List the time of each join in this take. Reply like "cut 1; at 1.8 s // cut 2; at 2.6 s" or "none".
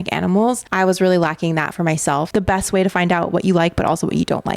cut 1; at 2.3 s

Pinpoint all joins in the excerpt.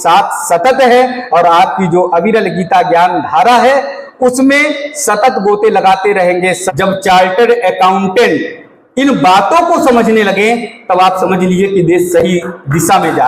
cut 1; at 6.6 s

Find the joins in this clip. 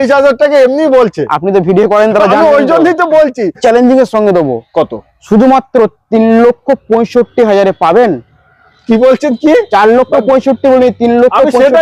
cut 1; at 3.6 s

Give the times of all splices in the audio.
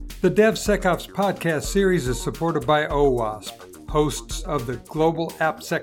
none

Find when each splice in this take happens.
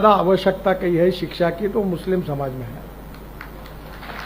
none

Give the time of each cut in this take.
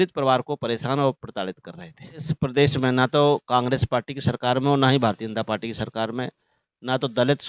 cut 1; at 2.3 s

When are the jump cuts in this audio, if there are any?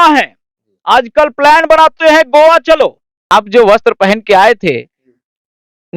cut 1; at 3.3 s

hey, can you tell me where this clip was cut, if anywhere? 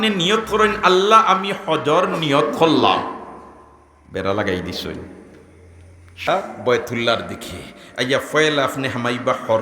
cut 1; at 6.3 s

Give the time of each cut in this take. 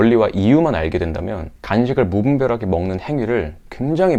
none

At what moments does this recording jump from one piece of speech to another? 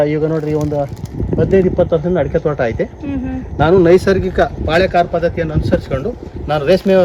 none

